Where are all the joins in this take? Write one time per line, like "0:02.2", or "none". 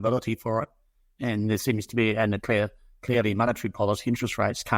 none